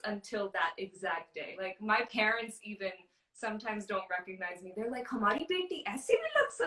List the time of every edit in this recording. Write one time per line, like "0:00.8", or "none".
0:01.6